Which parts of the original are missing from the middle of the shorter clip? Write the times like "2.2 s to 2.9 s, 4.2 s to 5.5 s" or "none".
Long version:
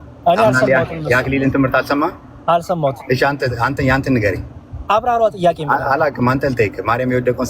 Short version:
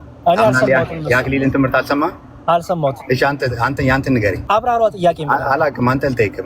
4.4 s to 4.8 s